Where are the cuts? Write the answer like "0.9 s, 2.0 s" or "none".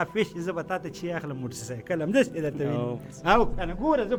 none